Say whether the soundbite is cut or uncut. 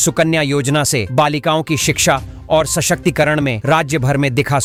uncut